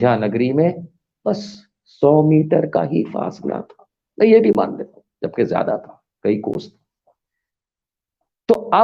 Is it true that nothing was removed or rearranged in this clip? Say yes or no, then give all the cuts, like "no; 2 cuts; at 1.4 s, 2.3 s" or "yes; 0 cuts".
yes; 0 cuts